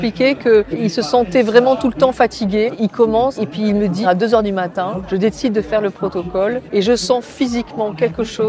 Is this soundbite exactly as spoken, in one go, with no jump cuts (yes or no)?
no